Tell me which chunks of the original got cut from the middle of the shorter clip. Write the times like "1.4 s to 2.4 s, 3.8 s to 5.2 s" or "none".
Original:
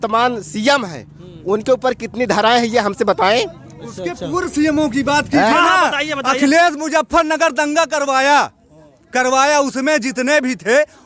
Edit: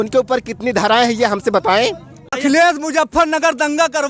3.8 s to 6.2 s